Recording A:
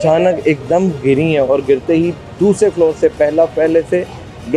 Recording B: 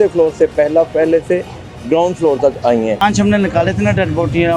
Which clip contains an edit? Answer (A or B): B